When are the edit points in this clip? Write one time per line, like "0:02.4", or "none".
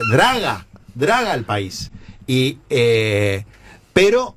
none